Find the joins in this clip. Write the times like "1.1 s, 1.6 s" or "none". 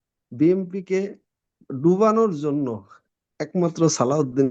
none